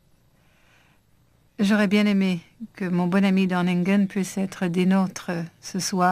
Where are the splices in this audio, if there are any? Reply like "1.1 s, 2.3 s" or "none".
3.0 s